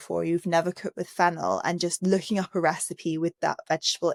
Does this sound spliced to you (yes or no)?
no